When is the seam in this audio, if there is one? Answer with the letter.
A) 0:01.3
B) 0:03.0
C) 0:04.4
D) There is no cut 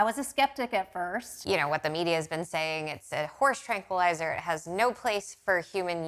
A